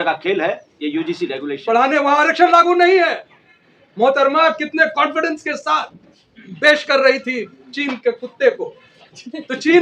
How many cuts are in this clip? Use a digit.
1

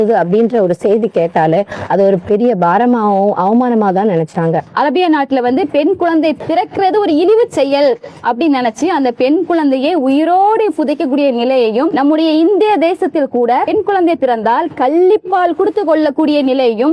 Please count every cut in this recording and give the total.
4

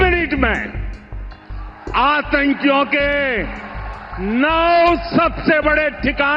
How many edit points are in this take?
0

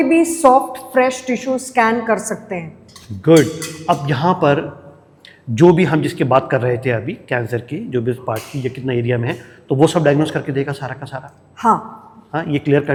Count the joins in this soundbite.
0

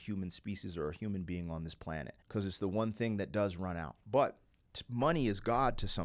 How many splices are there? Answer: 2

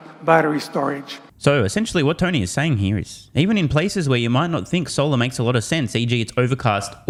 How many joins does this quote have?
0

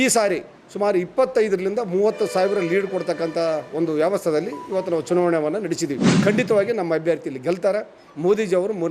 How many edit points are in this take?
1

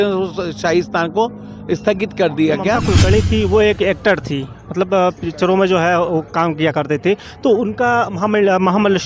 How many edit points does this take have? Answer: 1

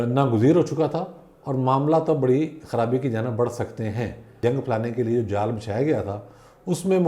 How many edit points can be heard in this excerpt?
1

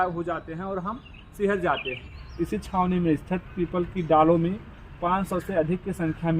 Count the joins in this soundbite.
1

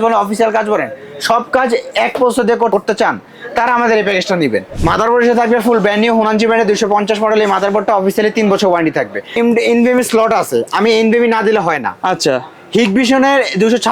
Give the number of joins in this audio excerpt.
3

